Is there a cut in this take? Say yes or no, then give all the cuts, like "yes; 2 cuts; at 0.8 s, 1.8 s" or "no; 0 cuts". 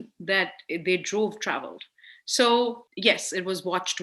yes; 1 cut; at 2.9 s